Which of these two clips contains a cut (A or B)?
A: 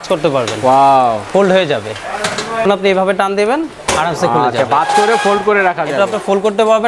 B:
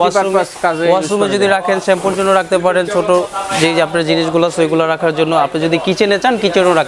A